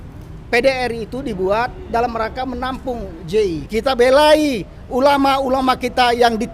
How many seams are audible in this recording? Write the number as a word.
one